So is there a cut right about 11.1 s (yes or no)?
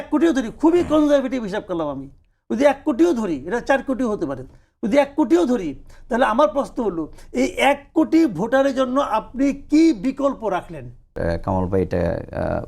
yes